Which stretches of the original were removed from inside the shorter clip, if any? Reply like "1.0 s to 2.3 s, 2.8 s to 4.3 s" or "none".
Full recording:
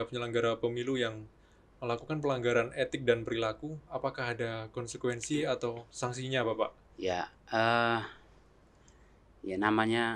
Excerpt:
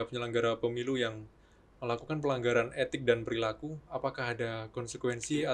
none